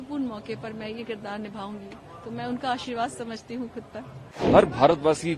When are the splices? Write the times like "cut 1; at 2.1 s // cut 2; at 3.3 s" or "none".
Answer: cut 1; at 4.4 s